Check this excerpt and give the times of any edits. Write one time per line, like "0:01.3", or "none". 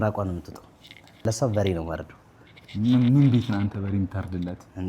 0:01.2